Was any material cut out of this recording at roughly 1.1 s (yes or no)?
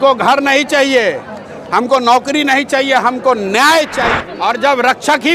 no